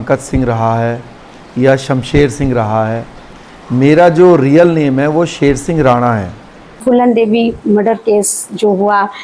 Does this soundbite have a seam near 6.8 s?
yes; 1 cut; at 6.8 s

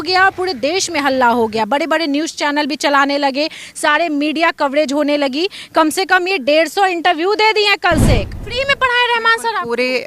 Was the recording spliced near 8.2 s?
yes; 1 cut; at 8.2 s

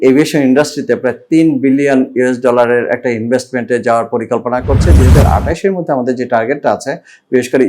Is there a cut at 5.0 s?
yes; 1 cut; at 5.0 s

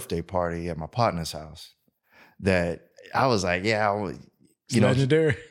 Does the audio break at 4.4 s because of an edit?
no; 1 cut; at 2.9 s

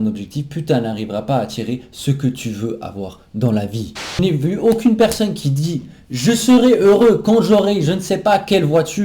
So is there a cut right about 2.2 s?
no; 1 cut; at 4.2 s

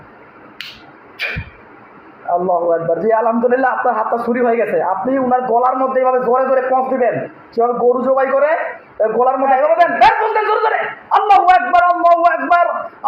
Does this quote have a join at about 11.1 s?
no; 1 cut; at 9.5 s

